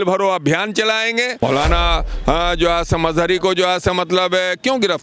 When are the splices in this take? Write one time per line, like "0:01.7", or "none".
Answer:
0:01.3